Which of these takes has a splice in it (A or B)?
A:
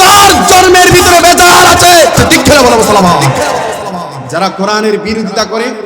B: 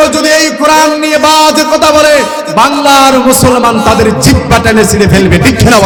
A